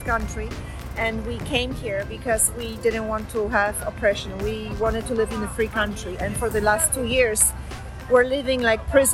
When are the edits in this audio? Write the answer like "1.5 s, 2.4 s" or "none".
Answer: none